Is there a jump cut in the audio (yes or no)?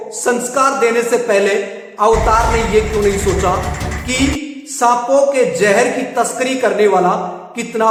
no